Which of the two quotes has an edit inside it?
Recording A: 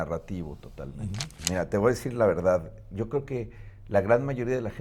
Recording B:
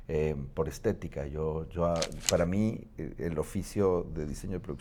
A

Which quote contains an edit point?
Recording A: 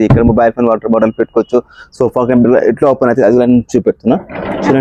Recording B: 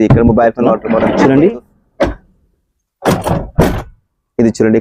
B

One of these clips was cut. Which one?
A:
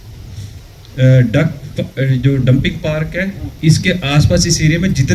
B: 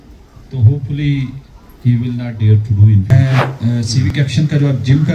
B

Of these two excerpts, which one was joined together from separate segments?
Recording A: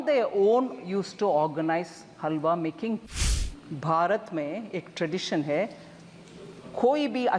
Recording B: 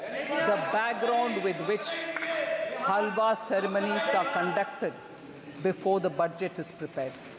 A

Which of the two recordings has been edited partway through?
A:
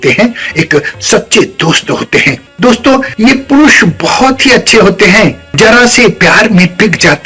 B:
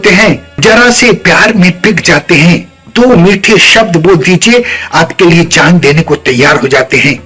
A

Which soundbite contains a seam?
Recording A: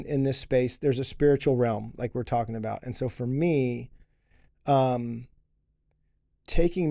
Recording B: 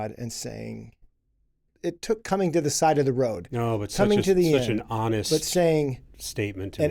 B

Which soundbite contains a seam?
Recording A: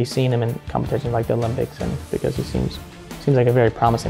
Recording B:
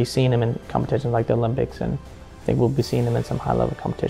A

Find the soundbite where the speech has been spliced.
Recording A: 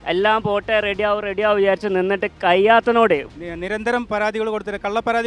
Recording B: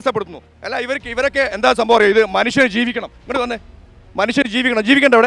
A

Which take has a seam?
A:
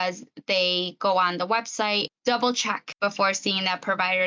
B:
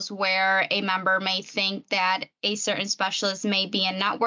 A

